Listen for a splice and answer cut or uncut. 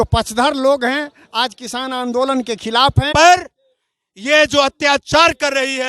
cut